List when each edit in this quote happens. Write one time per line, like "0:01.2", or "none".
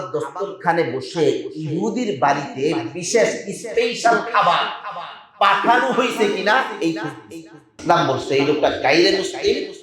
0:07.7